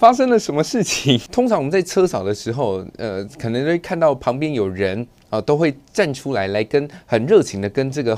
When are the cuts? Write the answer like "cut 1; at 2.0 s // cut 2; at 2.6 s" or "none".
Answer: cut 1; at 1.3 s